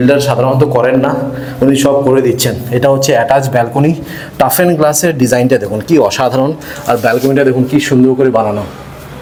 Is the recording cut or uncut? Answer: uncut